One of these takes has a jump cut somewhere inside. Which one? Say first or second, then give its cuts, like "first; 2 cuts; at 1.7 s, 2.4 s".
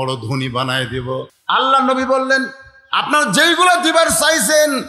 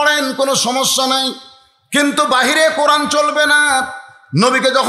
first; 1 cut; at 1.3 s